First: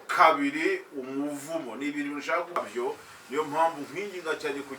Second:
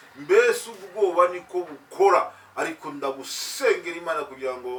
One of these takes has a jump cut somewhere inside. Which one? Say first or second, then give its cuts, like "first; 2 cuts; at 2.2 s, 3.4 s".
first; 1 cut; at 2.6 s